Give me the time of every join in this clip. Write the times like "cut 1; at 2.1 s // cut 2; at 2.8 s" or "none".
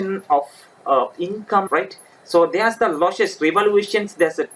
cut 1; at 1.7 s